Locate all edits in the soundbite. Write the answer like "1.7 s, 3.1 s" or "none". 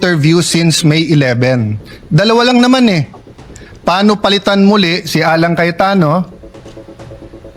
none